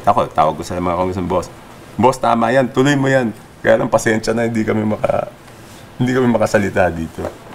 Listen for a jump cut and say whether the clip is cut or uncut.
uncut